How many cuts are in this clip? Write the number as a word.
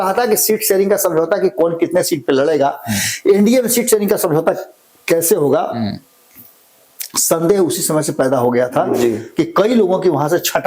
zero